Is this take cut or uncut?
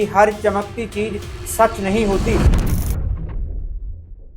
cut